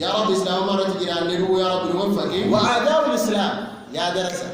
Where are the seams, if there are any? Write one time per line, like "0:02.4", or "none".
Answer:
0:02.6